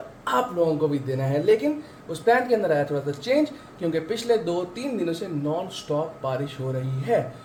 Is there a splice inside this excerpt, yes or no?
no